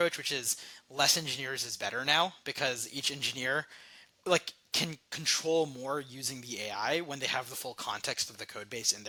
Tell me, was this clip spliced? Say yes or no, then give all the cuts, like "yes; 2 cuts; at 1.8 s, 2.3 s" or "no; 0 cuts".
no; 0 cuts